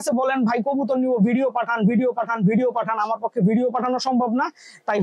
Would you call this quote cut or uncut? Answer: uncut